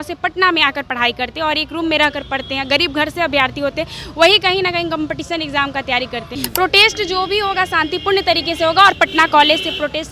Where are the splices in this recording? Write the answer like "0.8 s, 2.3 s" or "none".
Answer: 6.3 s